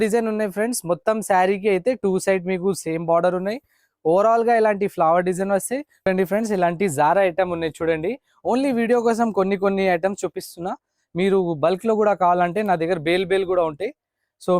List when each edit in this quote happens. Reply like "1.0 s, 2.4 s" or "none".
6.1 s